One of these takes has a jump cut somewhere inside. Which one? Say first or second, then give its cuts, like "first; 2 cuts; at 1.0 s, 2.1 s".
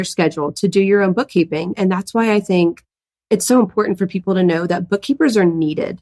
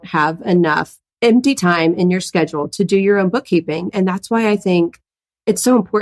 second; 1 cut; at 1.0 s